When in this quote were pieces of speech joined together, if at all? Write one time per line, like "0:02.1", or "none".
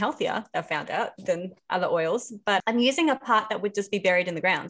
0:02.6

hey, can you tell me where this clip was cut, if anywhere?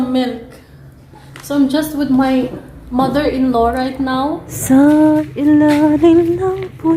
0:04.5

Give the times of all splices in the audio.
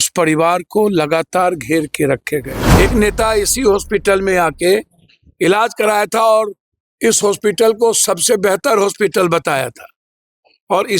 0:02.6

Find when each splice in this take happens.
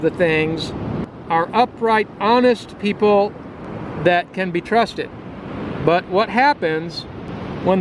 0:01.1

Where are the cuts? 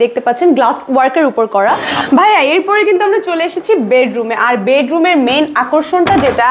0:01.9

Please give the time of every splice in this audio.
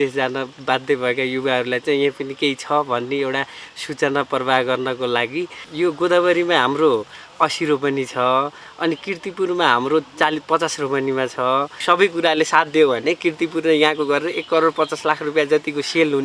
0:05.6
0:11.7

